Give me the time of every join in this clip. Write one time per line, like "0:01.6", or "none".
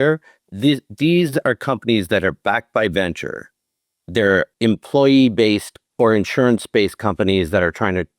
0:04.5
0:05.8

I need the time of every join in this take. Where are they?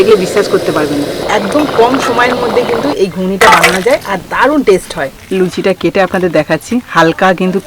0:01.2
0:05.2

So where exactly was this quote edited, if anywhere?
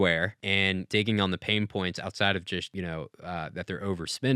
0:00.8
0:02.7

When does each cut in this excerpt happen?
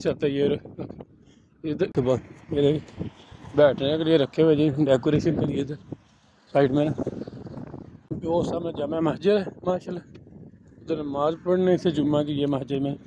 0:01.9
0:08.2

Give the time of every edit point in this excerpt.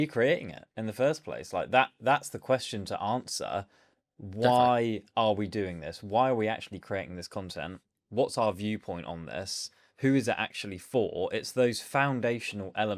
none

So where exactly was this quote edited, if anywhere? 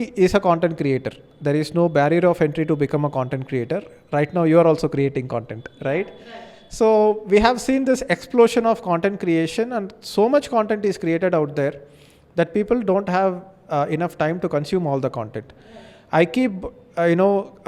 none

